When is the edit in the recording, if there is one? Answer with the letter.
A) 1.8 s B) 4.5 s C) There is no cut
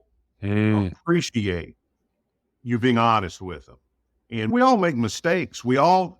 B